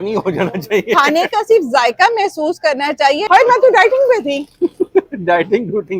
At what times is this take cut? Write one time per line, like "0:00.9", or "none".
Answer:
0:03.2